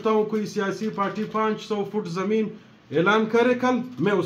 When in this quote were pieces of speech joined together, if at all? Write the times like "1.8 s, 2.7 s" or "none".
none